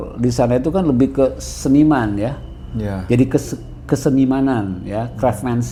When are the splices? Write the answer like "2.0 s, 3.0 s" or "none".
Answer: none